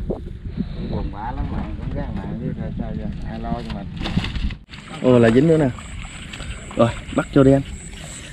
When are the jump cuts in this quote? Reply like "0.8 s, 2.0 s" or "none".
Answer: 5.0 s